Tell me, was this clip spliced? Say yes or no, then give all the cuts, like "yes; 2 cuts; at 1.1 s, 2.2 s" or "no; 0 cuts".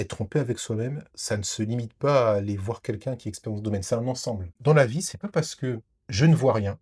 yes; 1 cut; at 4.5 s